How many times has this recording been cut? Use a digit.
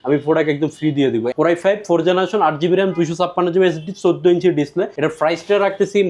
2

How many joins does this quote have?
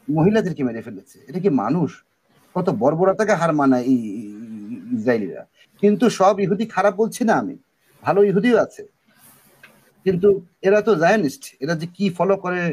0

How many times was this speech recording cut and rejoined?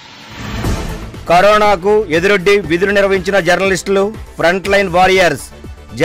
1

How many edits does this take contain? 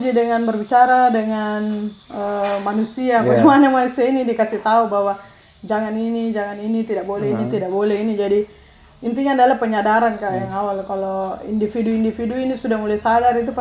0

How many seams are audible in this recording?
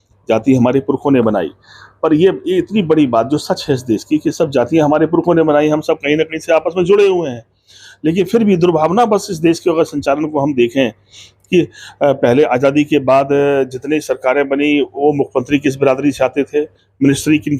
0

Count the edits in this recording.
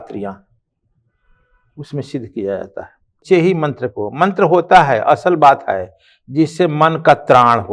1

